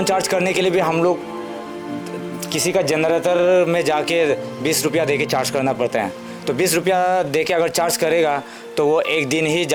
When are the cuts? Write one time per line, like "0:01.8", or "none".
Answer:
none